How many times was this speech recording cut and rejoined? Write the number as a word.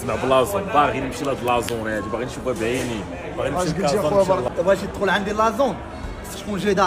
one